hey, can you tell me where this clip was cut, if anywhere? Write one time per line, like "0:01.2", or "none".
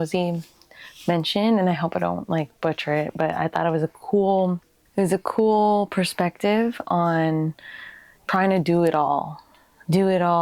none